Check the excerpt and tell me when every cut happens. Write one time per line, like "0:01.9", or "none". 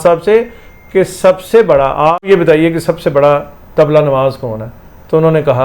0:02.2